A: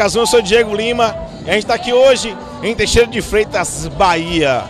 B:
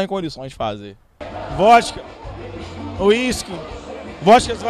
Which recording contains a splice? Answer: B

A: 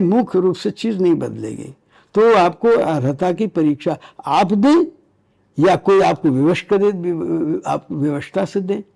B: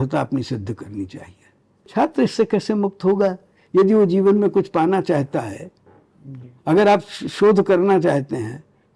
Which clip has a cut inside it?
B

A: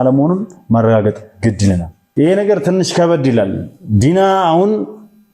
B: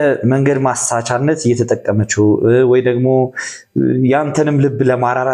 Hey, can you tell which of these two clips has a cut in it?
A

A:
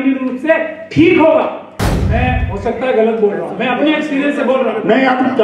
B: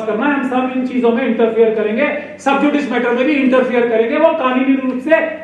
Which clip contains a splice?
A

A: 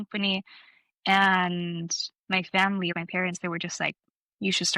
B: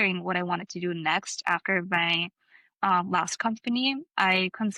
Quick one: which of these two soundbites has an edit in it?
A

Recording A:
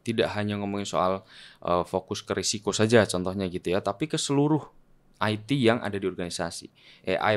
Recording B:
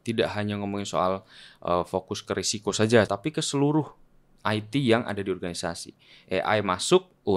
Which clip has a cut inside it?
B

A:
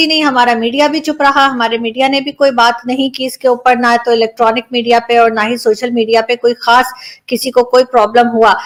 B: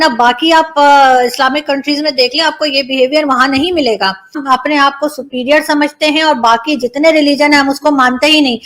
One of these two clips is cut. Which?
B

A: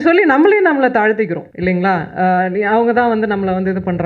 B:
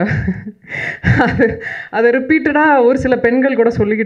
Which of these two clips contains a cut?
A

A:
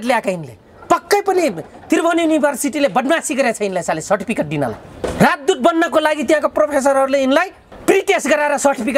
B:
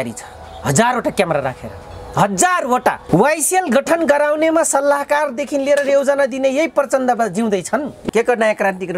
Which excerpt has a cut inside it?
B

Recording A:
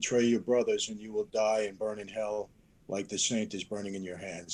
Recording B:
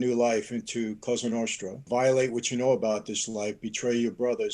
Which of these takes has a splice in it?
B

